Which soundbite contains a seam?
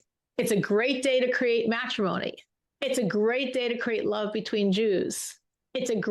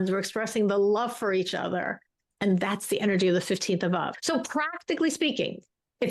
second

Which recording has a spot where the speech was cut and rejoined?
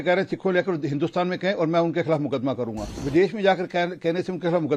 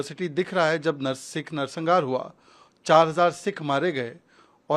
first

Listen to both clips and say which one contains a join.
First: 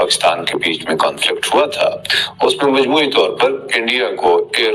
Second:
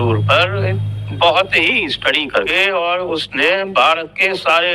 second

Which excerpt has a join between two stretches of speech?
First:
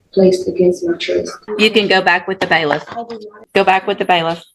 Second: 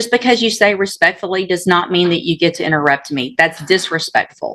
first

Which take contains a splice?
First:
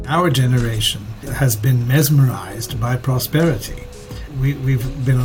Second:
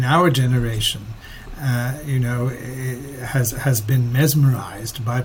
first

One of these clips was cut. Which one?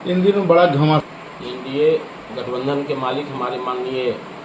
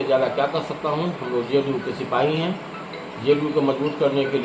first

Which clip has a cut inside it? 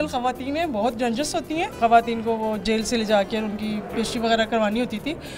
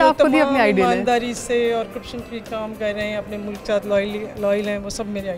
first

